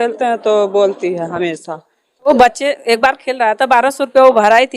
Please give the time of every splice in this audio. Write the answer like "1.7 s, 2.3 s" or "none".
2.3 s